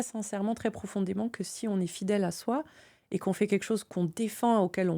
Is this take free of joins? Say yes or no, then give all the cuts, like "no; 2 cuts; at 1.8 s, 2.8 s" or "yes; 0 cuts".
no; 1 cut; at 3.9 s